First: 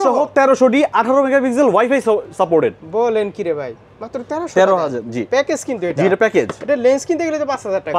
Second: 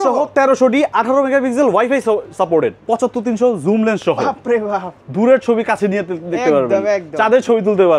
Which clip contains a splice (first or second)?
second